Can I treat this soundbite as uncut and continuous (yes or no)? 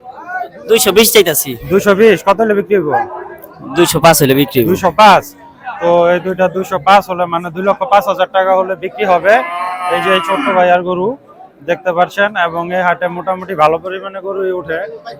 yes